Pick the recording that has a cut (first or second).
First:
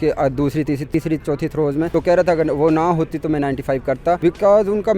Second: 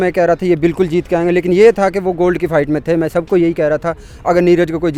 first